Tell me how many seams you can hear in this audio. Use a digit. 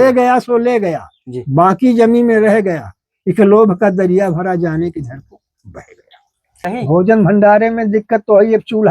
1